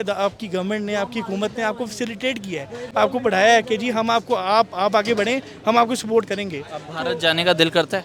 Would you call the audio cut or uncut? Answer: uncut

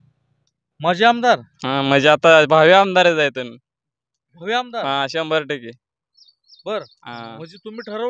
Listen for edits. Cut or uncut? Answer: uncut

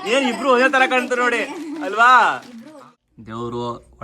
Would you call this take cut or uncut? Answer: cut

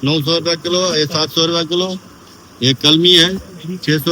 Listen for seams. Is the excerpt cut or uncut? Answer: uncut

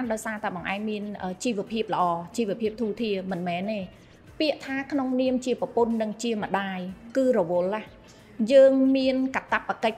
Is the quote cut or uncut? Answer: uncut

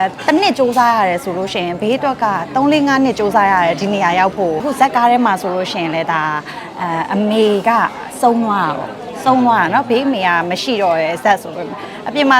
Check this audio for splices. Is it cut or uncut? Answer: cut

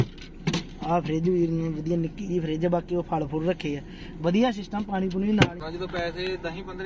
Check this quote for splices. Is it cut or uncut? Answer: cut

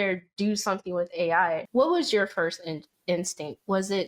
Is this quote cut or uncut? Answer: cut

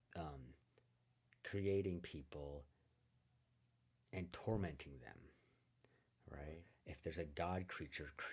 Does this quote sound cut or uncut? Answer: cut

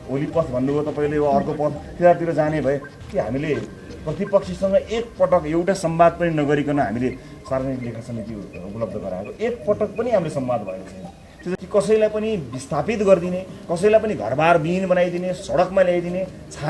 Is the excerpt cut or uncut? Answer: cut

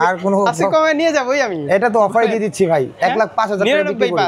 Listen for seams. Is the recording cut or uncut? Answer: uncut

